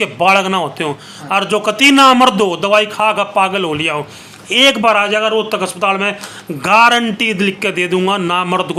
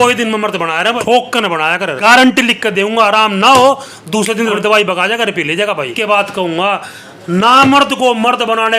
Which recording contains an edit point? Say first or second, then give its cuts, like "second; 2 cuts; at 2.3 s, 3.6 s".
second; 4 cuts; at 1.0 s, 2.0 s, 4.1 s, 5.9 s